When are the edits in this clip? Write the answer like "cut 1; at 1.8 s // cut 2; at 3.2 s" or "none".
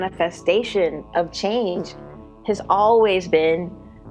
none

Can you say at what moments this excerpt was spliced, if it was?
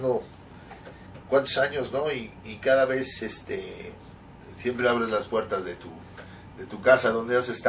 none

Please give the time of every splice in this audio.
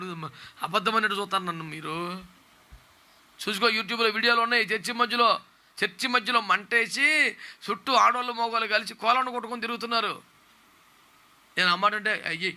none

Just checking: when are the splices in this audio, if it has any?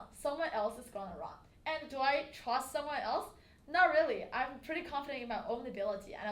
none

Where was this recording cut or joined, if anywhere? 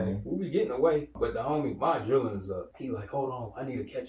cut 1; at 1.1 s // cut 2; at 2.7 s

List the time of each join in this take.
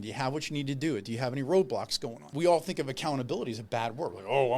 cut 1; at 2.2 s

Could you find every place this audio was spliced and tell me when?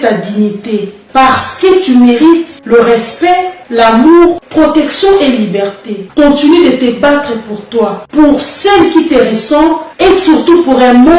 cut 1; at 1.0 s // cut 2; at 6.0 s

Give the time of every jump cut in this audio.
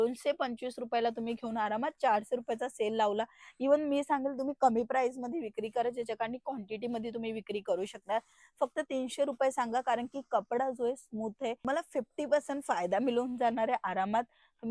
none

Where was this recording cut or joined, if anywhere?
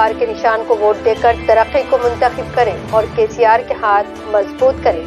cut 1; at 3.1 s

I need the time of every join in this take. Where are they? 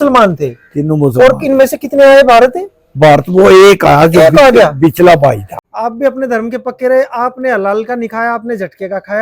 cut 1; at 5.5 s

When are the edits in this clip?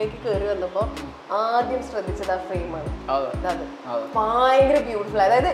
none

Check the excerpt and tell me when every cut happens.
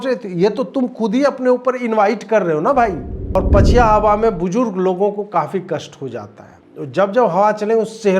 cut 1; at 3.4 s

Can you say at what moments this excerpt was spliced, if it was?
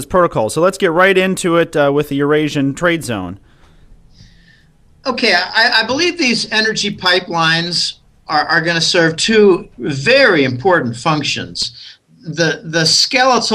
cut 1; at 9.0 s

